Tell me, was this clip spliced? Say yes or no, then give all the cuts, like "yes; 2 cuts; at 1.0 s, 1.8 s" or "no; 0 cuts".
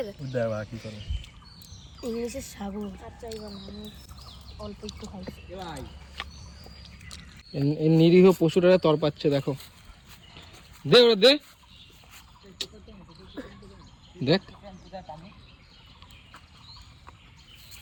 no; 0 cuts